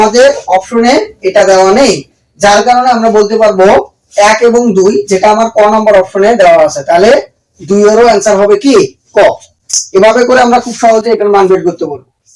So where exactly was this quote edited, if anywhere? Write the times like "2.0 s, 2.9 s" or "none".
none